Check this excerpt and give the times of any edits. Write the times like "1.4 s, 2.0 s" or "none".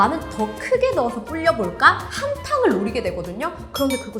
none